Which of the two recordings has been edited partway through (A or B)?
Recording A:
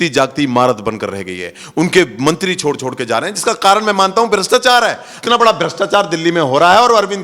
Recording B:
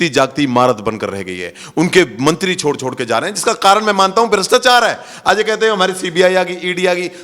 A